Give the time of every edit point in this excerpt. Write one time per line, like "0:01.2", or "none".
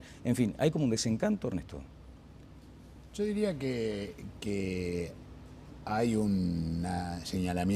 0:02.4